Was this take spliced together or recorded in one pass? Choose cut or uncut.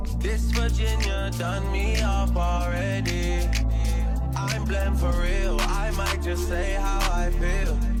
uncut